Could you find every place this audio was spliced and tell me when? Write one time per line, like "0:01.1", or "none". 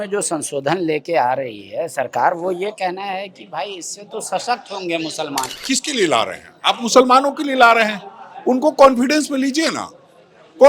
0:05.6

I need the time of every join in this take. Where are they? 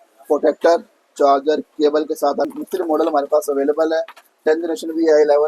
0:02.5

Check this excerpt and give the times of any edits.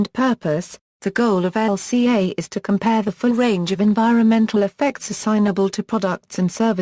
0:04.4

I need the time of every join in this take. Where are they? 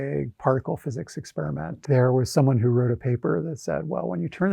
0:01.8

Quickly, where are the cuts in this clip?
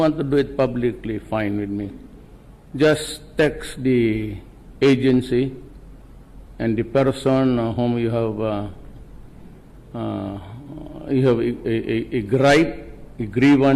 0:03.6

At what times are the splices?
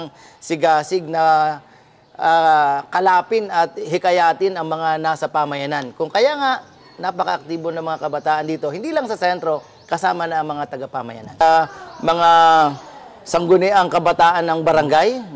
0:11.4

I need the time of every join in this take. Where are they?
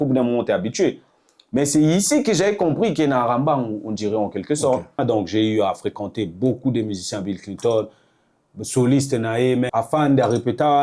0:05.0
0:09.7

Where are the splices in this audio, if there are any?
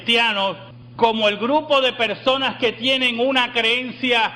0:02.5

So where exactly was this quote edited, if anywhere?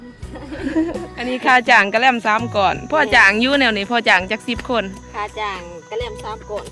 0:01.3

